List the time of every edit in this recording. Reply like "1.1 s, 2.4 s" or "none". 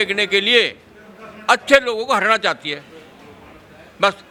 none